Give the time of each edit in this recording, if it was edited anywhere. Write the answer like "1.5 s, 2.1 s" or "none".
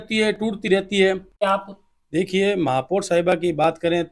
1.4 s